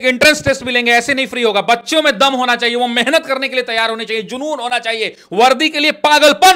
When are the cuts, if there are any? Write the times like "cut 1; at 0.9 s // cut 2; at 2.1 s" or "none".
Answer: none

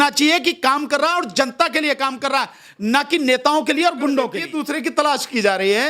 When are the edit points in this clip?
cut 1; at 4.5 s

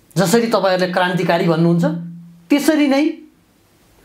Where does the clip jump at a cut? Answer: none

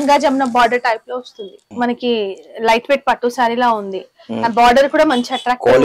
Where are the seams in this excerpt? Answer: cut 1; at 1.6 s

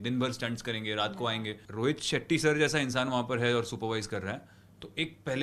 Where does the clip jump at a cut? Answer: cut 1; at 1.6 s

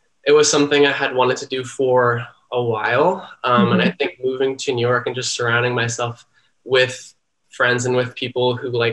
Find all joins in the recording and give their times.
none

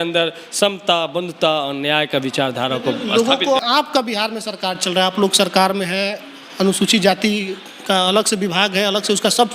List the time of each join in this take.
cut 1; at 3.6 s

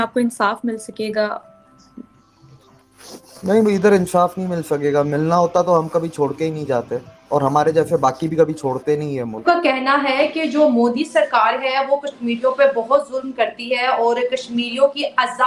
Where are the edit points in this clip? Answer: cut 1; at 9.4 s

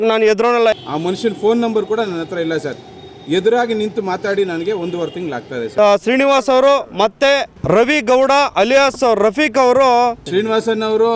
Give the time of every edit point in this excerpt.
cut 1; at 0.7 s // cut 2; at 5.7 s // cut 3; at 10.2 s

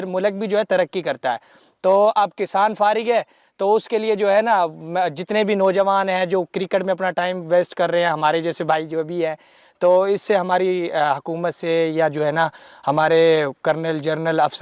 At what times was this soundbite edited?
none

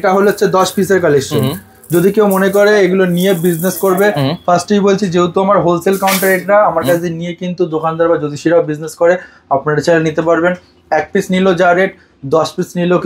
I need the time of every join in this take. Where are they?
none

